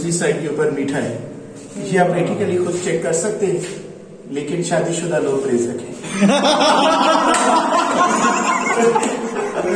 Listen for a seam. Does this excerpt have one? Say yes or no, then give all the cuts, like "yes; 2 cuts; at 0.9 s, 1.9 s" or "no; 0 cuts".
no; 0 cuts